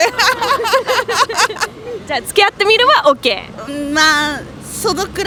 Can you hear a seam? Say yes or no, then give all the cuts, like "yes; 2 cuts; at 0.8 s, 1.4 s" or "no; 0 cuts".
no; 0 cuts